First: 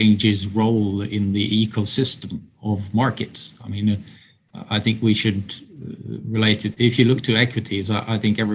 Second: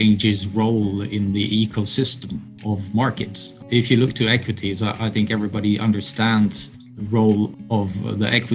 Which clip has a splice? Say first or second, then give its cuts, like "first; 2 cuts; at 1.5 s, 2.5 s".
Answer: second; 2 cuts; at 3.6 s, 7.5 s